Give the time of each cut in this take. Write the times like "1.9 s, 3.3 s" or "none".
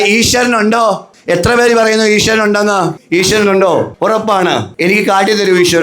1.1 s, 3.0 s, 4.4 s